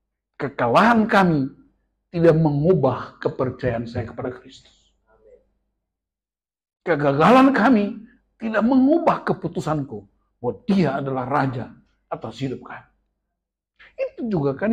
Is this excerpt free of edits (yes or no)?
yes